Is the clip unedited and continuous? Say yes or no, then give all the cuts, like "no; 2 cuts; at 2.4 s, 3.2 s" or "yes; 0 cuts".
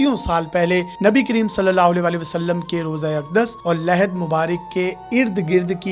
yes; 0 cuts